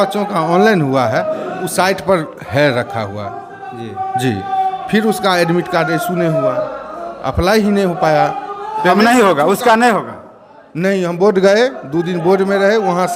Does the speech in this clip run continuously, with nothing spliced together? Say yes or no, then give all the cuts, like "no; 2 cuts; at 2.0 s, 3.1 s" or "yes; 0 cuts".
yes; 0 cuts